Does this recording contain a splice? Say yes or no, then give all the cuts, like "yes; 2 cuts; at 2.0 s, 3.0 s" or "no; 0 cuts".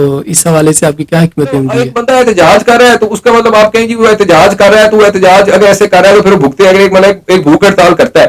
yes; 1 cut; at 1.8 s